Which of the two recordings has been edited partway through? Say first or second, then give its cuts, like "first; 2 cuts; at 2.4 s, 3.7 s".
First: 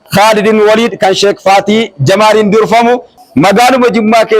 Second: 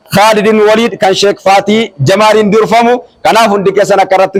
first; 1 cut; at 3.2 s